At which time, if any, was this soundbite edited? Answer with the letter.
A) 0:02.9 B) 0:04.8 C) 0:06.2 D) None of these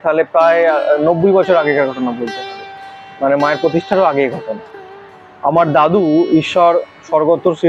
D